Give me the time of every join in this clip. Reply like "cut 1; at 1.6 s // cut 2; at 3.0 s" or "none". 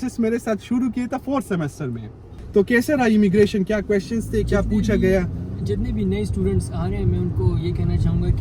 cut 1; at 2.3 s